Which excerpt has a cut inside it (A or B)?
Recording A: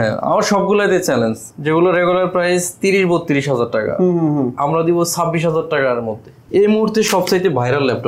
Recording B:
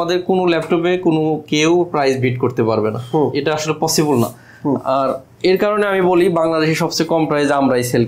A